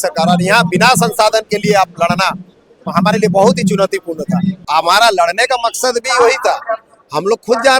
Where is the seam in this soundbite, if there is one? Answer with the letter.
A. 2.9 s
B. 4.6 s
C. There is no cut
B